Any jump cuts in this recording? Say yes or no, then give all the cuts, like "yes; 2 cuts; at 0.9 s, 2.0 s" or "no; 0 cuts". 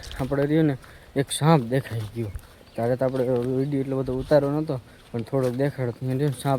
no; 0 cuts